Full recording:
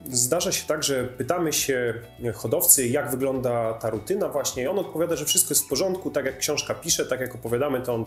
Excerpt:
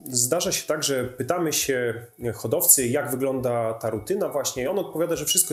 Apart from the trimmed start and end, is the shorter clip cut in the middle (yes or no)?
no